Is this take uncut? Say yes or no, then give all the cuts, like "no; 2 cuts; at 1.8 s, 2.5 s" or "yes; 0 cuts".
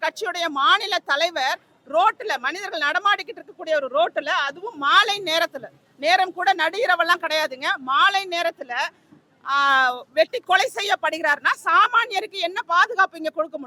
yes; 0 cuts